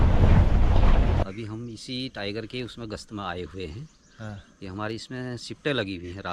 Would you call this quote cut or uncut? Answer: cut